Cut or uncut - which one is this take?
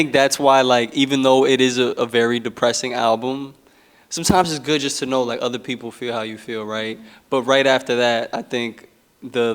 uncut